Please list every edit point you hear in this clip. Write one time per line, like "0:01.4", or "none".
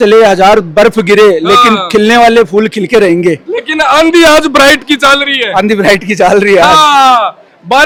none